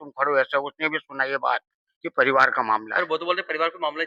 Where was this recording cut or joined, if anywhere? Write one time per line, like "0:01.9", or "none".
none